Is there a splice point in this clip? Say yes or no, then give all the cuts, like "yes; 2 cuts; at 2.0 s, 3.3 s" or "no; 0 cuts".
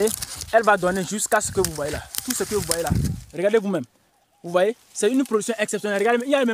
yes; 1 cut; at 3.2 s